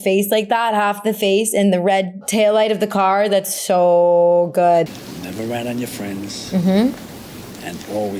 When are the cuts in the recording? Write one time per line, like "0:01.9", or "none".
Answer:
0:04.9